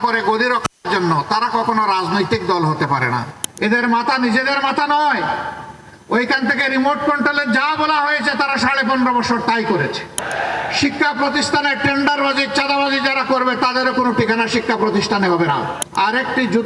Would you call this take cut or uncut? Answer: cut